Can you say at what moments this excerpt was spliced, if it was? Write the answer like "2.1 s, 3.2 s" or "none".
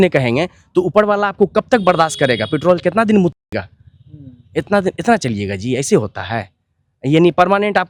none